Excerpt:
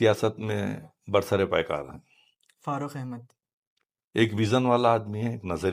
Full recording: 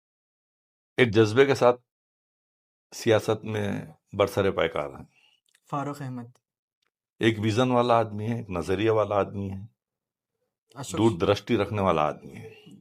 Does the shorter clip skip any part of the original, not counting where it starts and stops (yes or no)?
no